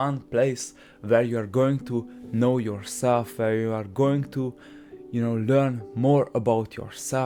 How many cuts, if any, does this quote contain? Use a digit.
0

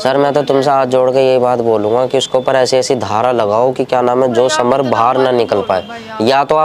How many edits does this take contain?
0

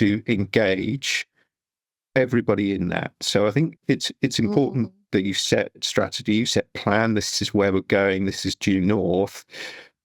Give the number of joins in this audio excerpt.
1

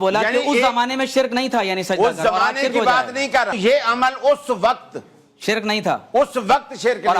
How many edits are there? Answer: 1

